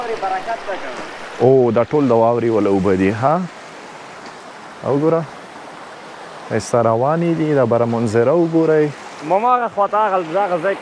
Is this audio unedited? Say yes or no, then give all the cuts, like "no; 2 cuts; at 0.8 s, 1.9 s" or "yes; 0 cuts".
yes; 0 cuts